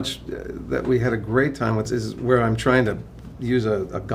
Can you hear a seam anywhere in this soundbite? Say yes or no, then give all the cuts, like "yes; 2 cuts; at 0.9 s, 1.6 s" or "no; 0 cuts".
yes; 1 cut; at 1.8 s